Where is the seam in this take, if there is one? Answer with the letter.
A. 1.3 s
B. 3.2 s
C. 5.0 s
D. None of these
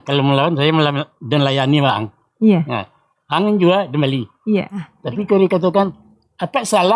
C